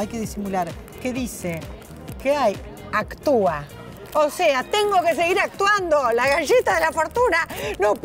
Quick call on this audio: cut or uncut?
uncut